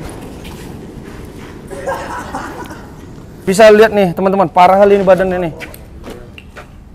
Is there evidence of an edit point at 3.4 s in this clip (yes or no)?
yes